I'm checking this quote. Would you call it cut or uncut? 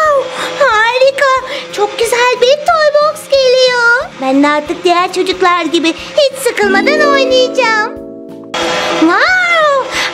cut